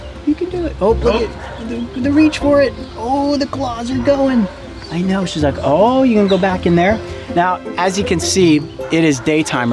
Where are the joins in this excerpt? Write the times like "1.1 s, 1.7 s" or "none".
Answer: none